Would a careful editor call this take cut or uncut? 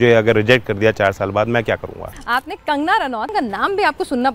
cut